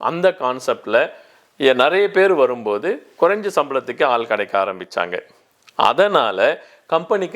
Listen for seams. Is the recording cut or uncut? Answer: uncut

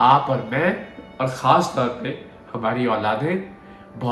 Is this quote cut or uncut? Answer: uncut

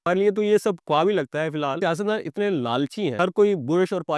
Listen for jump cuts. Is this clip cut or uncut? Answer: cut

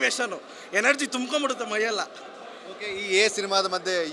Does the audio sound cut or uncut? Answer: uncut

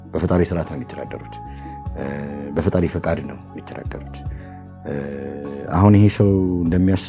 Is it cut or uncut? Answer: uncut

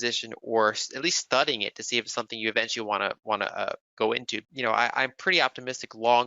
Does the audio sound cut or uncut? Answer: cut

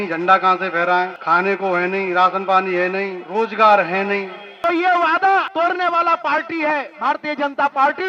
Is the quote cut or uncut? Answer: cut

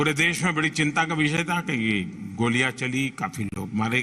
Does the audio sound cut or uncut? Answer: uncut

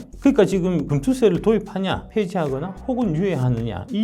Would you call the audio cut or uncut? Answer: cut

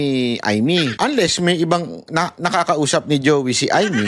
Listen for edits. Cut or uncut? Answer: cut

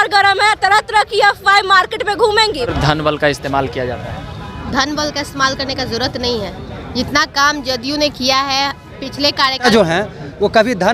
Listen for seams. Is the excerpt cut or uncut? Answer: cut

